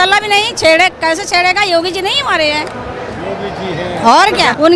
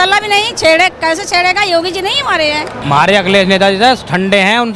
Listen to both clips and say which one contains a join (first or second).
second